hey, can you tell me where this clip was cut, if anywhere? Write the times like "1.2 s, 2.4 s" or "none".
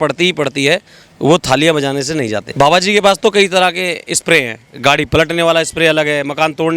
2.4 s

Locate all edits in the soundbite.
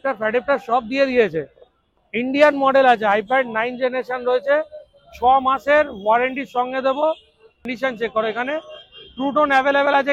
7.7 s

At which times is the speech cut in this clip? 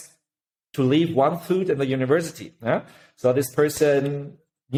none

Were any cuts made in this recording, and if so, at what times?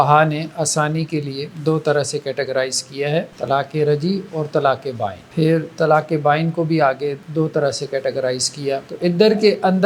1.4 s, 3.3 s, 5.2 s, 7.2 s, 8.9 s

